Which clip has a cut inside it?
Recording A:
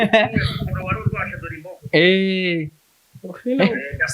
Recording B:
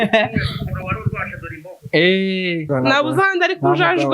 B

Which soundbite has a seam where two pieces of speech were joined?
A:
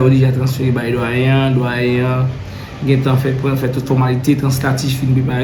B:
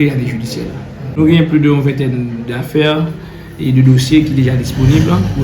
B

